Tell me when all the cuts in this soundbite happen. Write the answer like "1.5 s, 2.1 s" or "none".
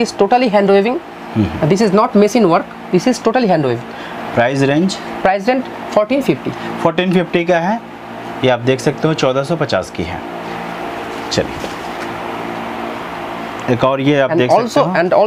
none